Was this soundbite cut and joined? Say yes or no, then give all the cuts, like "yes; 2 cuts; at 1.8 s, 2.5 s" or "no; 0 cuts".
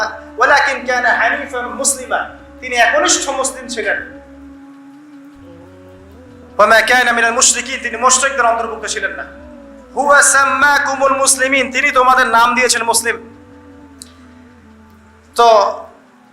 yes; 2 cuts; at 4.7 s, 6.6 s